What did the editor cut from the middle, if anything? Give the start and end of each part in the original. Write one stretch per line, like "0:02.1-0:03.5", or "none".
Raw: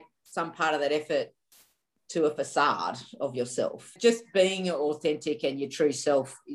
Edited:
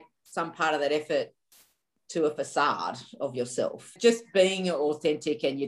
none